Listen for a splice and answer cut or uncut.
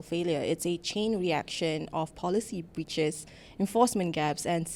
uncut